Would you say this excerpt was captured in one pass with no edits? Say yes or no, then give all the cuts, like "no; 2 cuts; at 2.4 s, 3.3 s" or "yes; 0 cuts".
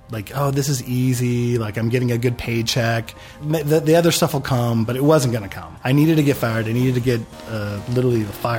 yes; 0 cuts